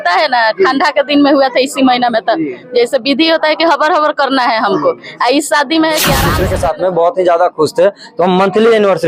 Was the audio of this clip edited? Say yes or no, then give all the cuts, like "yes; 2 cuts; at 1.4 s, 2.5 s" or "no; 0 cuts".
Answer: yes; 1 cut; at 6.3 s